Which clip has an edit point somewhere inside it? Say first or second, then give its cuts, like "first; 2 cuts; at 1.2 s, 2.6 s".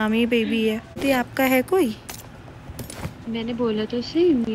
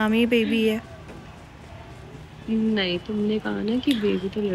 first; 1 cut; at 1.0 s